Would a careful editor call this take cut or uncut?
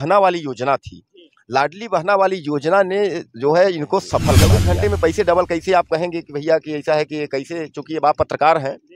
cut